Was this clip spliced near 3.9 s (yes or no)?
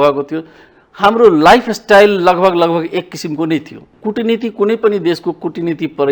yes